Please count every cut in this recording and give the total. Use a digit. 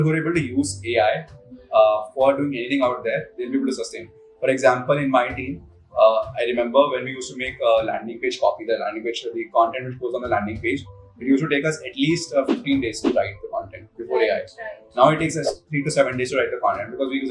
0